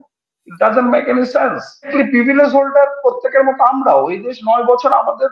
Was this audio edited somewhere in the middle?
yes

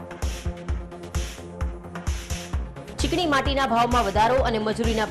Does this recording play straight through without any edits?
yes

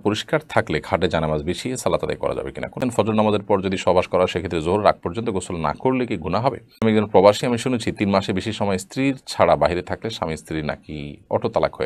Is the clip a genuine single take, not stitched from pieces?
no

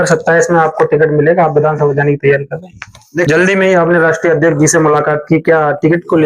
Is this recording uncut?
no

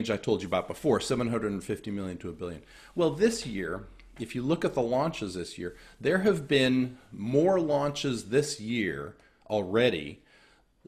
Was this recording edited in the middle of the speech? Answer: no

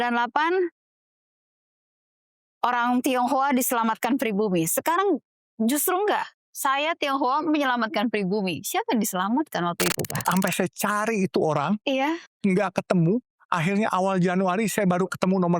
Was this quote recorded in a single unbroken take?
no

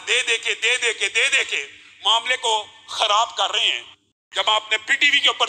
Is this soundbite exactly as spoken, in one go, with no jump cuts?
no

